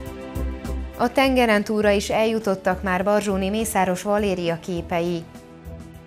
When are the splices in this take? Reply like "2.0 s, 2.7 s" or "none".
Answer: 0.9 s, 5.3 s